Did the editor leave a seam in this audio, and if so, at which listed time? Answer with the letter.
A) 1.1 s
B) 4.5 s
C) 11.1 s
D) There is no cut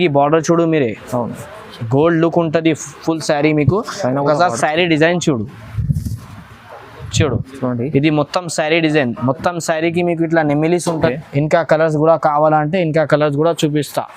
C